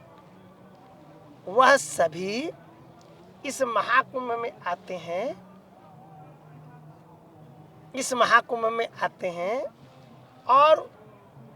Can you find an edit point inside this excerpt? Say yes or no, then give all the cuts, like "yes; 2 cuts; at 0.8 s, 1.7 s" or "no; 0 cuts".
no; 0 cuts